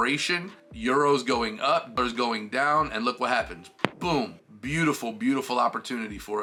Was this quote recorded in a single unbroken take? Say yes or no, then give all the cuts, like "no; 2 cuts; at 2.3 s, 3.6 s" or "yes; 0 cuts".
yes; 0 cuts